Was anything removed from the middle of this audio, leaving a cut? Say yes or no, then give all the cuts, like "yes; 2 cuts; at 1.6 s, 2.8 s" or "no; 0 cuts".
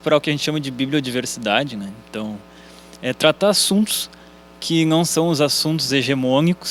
no; 0 cuts